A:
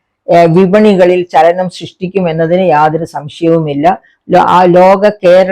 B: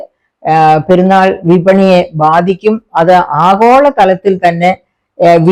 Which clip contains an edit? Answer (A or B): A